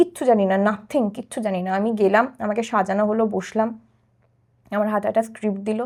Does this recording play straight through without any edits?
yes; 0 cuts

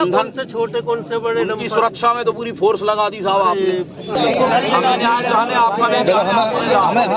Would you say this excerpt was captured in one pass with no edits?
no; 1 cut; at 4.1 s

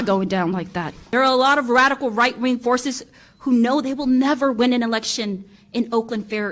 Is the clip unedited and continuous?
no; 1 cut; at 1.0 s

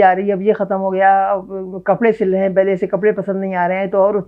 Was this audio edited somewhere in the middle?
no; 0 cuts

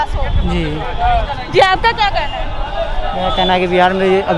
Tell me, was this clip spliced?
no; 0 cuts

